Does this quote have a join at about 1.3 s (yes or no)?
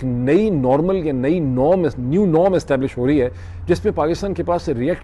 no